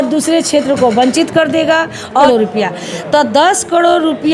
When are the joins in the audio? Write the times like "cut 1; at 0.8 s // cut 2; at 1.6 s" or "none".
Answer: cut 1; at 2.2 s